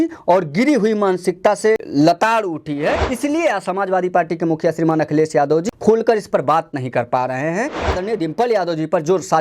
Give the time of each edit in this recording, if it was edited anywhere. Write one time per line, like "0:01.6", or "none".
0:01.8
0:03.1
0:05.6
0:07.9

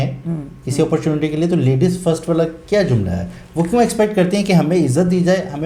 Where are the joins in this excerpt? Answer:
none

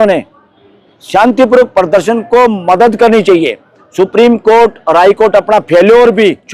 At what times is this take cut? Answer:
none

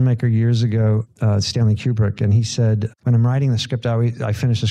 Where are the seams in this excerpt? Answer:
0:01.1
0:02.9

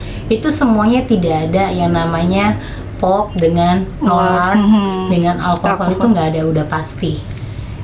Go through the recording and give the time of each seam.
none

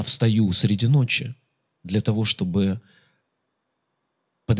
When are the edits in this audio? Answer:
none

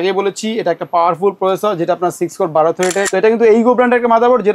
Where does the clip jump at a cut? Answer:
0:03.1

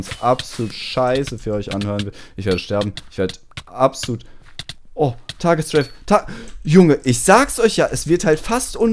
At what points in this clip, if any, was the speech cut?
none

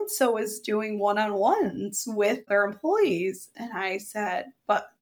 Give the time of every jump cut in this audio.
0:02.4

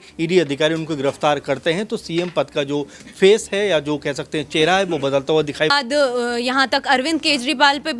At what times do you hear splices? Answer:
0:05.7

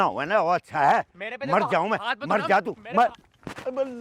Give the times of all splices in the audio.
none

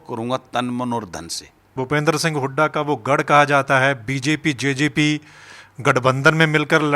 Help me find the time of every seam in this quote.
0:01.7

